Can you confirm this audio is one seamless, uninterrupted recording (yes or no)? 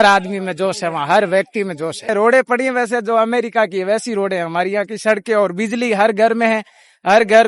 no